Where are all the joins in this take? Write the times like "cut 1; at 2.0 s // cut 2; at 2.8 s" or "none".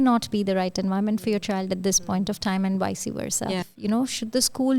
cut 1; at 3.7 s